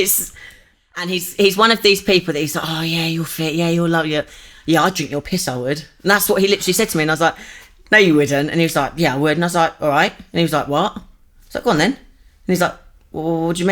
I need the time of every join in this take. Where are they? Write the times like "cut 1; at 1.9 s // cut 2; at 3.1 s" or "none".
cut 1; at 1.2 s